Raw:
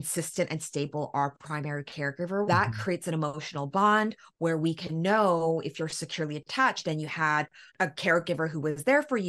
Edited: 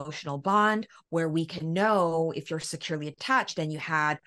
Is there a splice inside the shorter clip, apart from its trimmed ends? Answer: no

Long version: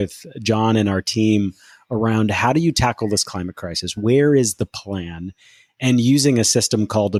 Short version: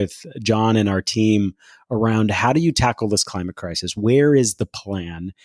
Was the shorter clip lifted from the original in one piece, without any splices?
yes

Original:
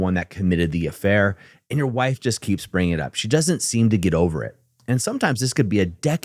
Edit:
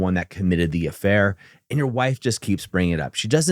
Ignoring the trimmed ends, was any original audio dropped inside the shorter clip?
no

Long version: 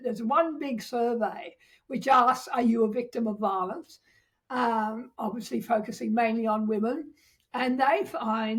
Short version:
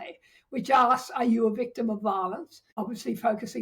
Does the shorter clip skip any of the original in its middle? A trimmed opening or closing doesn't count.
yes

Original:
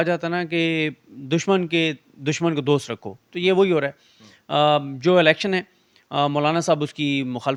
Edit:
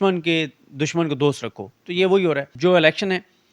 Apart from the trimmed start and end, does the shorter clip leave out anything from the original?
yes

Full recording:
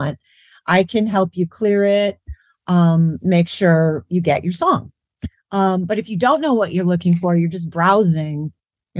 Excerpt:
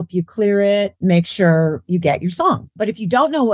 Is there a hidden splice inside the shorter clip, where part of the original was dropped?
yes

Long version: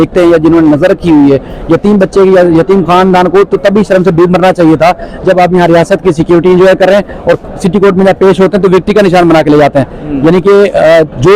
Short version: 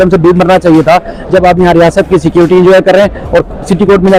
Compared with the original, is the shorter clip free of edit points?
yes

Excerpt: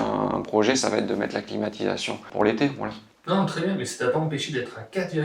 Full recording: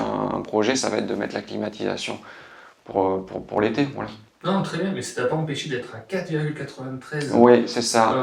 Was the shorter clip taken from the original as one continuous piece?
no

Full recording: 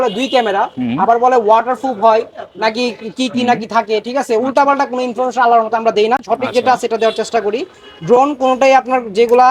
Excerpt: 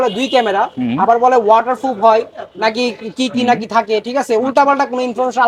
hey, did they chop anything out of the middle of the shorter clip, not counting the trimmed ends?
no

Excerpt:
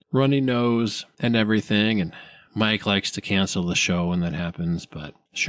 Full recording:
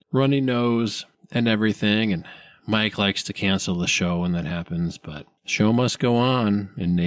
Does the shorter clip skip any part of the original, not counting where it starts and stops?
yes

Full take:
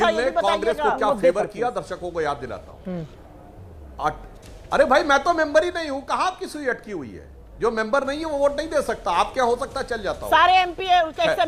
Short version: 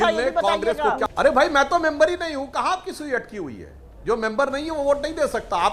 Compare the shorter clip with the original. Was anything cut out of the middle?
yes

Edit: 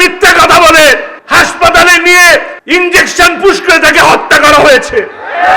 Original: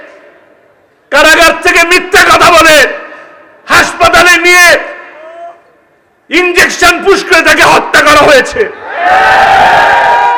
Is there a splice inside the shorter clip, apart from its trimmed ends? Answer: yes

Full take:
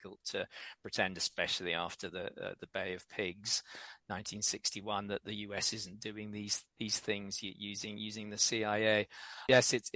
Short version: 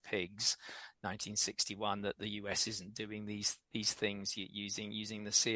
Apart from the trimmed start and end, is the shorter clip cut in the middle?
no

